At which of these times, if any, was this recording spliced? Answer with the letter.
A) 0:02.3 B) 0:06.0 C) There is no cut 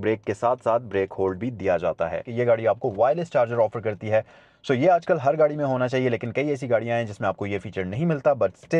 A